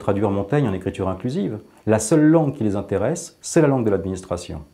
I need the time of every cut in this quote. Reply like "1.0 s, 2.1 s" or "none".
none